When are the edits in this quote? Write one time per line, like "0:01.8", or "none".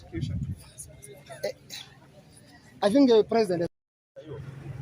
0:03.7